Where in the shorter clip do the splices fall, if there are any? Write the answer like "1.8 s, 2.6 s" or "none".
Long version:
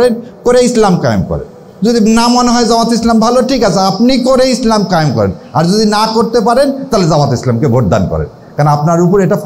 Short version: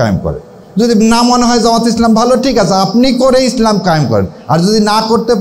none